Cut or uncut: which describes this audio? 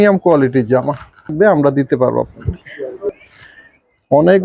cut